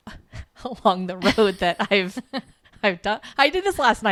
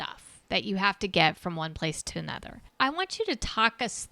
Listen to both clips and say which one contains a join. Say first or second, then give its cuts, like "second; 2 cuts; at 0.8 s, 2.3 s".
second; 1 cut; at 2.7 s